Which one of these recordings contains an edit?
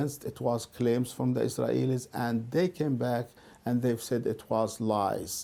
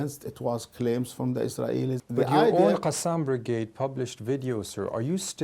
second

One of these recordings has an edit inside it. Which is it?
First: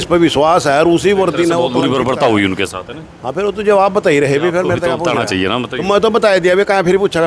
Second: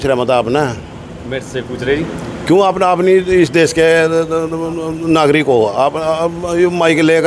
first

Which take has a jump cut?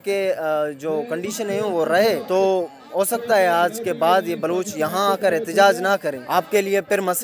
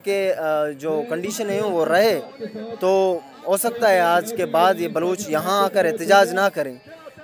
first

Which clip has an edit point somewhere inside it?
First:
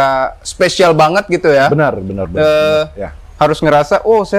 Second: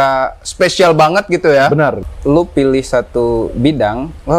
second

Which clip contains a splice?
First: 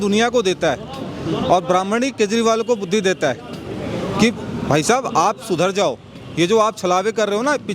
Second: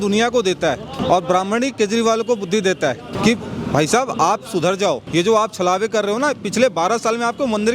second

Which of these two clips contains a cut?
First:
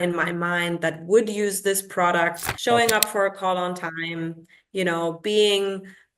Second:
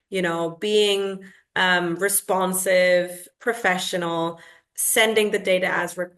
first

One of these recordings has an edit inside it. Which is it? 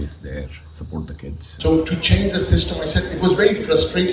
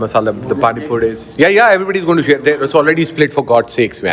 first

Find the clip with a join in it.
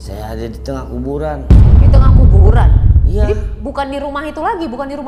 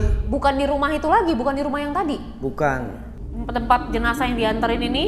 second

